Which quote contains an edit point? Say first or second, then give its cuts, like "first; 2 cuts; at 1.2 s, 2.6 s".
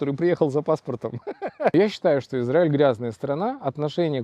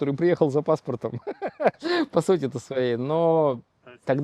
first; 1 cut; at 1.7 s